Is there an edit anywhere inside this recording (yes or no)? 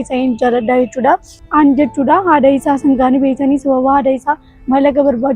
yes